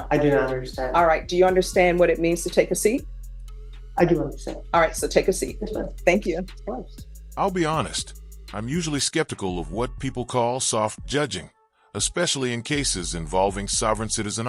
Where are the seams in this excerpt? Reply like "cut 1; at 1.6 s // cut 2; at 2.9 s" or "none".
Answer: none